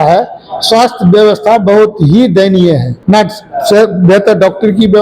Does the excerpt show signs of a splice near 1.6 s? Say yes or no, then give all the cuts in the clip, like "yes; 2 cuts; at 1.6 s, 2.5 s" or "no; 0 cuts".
no; 1 cut; at 2.9 s